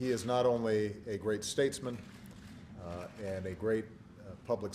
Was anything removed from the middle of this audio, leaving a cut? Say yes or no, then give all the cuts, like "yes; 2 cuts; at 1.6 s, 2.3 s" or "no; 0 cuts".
yes; 1 cut; at 1.2 s